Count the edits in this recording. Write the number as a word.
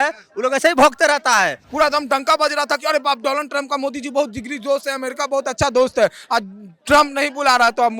one